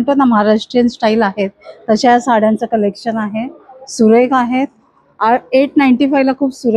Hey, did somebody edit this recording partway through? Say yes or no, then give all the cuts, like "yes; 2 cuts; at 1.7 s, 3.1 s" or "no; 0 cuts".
no; 0 cuts